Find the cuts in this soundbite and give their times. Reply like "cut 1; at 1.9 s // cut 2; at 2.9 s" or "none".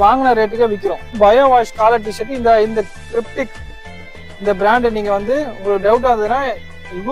cut 1; at 1.2 s

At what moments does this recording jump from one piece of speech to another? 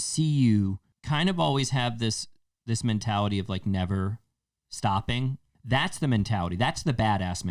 cut 1; at 0.9 s // cut 2; at 5.5 s

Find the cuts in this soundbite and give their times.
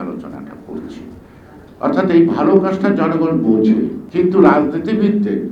cut 1; at 4.0 s

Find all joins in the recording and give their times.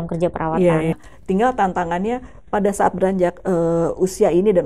cut 1; at 0.9 s

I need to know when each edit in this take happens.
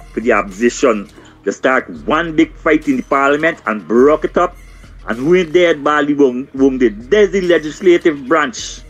none

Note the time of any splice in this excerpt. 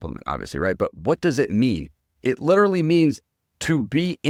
none

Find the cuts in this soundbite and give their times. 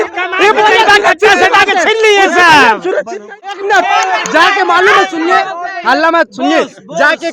cut 1; at 3.5 s

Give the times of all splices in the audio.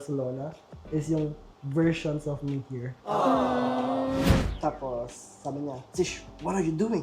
cut 1; at 4.4 s

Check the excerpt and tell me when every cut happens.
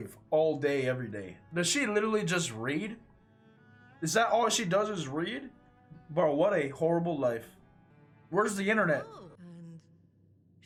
none

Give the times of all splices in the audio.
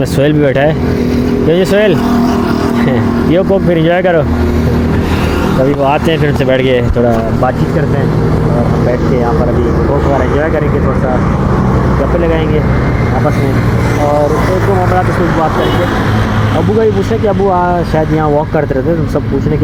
none

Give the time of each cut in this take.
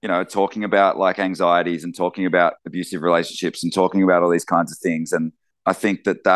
cut 1; at 5.4 s

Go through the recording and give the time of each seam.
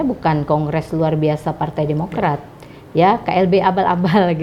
none

